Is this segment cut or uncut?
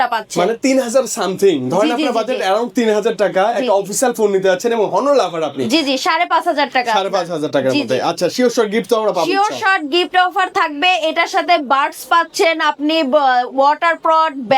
cut